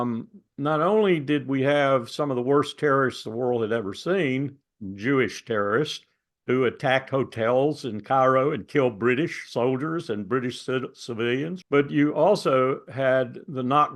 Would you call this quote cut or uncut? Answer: cut